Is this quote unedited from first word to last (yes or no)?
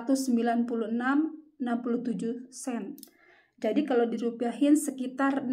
yes